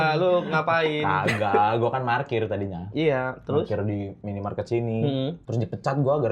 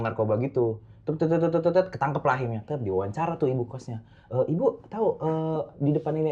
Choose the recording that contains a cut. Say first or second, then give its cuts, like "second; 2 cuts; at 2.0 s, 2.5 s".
first; 1 cut; at 5.4 s